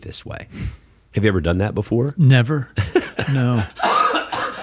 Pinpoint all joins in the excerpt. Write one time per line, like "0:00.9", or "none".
0:03.7